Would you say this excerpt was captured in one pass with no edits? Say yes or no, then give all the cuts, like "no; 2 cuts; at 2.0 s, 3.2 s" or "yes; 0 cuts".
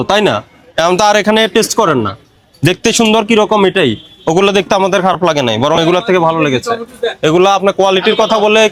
yes; 0 cuts